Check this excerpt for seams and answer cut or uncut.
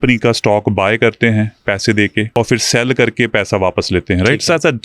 cut